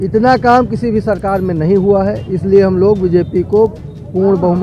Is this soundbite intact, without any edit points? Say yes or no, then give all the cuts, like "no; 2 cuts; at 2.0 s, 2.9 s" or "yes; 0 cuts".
yes; 0 cuts